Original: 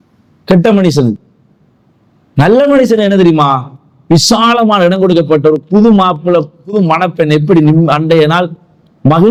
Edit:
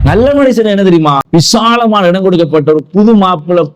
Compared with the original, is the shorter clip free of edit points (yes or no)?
no